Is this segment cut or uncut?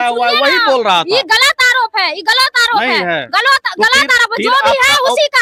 uncut